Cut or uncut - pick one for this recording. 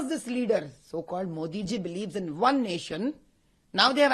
uncut